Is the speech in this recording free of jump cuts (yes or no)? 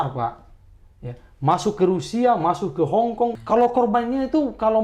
no